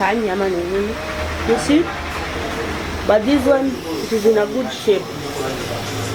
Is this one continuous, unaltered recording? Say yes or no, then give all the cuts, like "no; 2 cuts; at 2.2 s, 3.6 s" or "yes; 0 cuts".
yes; 0 cuts